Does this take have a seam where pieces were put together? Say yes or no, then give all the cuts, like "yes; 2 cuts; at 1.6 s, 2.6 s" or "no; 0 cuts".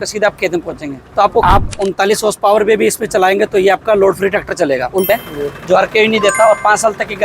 yes; 2 cuts; at 1.4 s, 5.1 s